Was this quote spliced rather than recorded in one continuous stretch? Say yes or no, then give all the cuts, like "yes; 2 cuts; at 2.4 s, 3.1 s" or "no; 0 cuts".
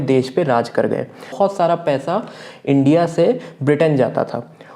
yes; 1 cut; at 1.3 s